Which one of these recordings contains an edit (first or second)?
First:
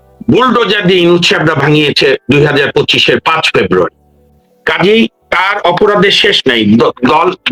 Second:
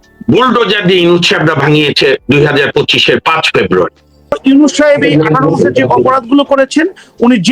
second